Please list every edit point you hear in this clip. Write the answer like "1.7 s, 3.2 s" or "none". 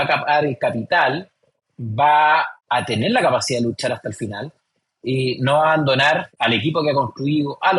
2.5 s